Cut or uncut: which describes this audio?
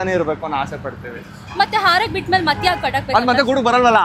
uncut